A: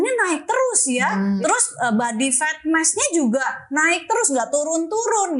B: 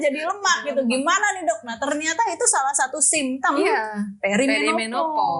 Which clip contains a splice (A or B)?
A